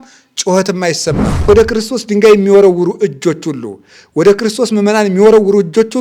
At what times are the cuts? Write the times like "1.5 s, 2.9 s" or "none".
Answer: 1.5 s